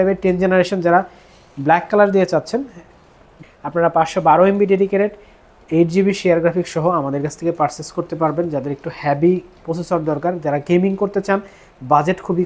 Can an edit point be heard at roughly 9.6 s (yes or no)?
no